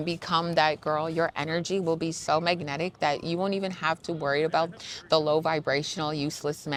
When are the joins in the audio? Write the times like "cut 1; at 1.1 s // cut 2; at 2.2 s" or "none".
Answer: none